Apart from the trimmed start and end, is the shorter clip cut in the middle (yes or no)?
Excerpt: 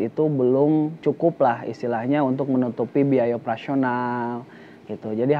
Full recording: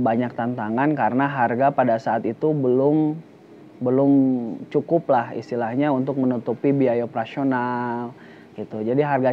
yes